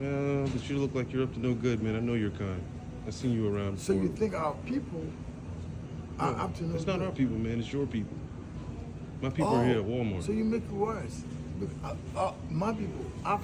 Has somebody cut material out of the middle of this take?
no; 0 cuts

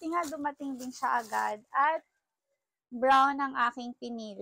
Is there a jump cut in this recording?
no; 0 cuts

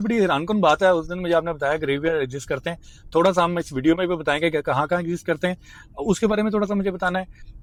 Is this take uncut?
yes; 0 cuts

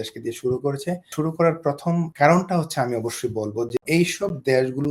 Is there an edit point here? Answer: yes; 3 cuts; at 1.1 s, 2.1 s, 3.8 s

